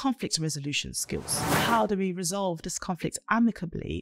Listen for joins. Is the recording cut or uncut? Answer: cut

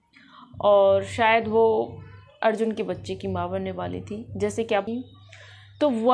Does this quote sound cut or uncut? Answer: cut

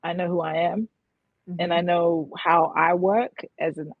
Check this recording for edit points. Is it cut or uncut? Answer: uncut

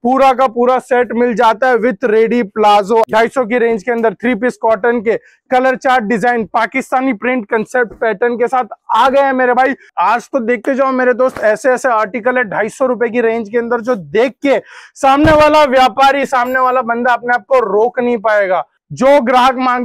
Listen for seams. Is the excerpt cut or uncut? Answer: cut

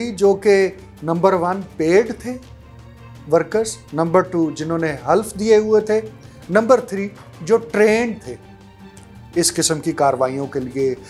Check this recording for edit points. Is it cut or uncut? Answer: uncut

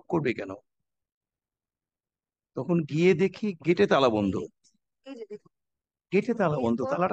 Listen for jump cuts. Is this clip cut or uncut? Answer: uncut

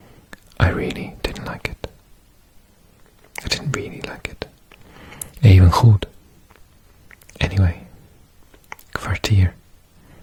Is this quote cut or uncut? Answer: uncut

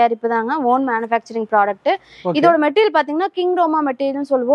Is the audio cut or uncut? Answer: uncut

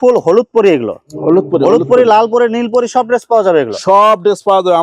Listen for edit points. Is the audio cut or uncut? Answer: uncut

